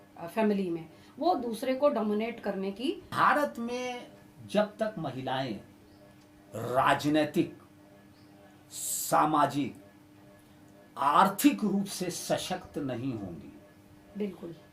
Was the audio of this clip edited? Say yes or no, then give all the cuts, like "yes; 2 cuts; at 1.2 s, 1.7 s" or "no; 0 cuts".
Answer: yes; 1 cut; at 3.1 s